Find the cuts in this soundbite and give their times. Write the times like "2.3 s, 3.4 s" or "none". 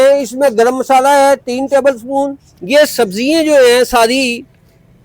2.5 s

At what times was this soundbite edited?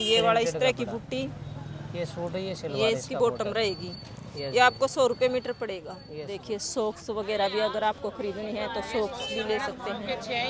6.3 s

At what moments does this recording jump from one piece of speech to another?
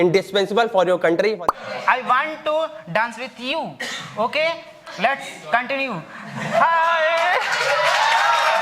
1.4 s

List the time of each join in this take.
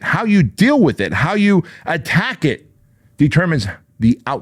none

